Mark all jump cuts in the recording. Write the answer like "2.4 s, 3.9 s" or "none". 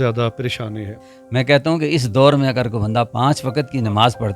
1.1 s, 3.1 s